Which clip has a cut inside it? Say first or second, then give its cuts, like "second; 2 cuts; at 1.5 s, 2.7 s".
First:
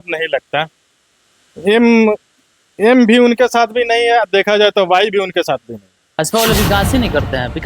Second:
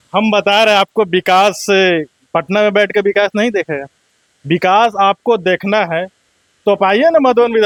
first; 1 cut; at 6.2 s